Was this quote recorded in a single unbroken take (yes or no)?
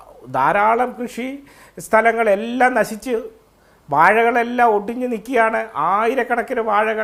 yes